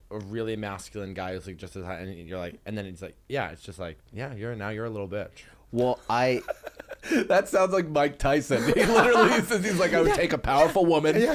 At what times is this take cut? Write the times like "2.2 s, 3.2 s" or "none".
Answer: none